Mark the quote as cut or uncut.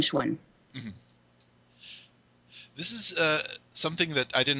cut